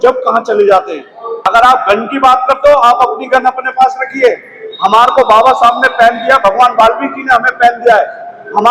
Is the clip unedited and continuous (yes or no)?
no